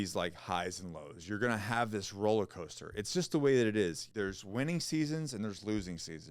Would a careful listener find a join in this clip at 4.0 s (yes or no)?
yes